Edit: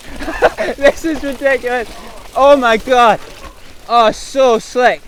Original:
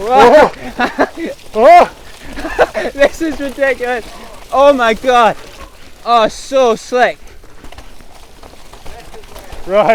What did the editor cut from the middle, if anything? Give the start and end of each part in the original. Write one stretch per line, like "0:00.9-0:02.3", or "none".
none